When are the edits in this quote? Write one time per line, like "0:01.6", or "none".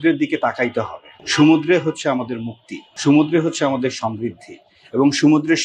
none